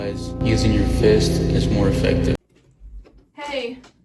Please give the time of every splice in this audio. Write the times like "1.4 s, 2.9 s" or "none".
2.4 s